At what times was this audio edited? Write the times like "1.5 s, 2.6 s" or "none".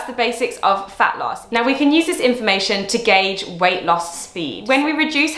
1.4 s, 4.5 s